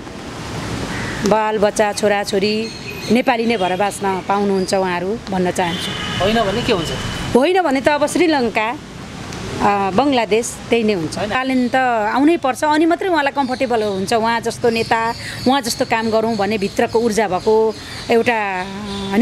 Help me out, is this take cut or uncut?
cut